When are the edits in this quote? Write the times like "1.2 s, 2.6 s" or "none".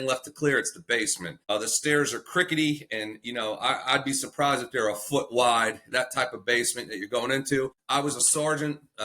1.3 s, 7.8 s